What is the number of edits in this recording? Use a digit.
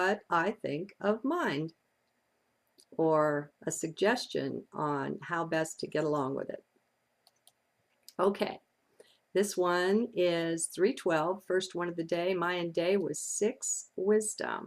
1